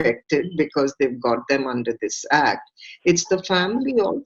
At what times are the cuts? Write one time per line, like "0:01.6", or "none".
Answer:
none